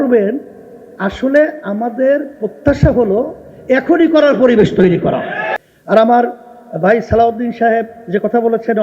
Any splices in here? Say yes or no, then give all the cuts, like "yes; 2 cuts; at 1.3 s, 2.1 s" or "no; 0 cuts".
yes; 1 cut; at 5.5 s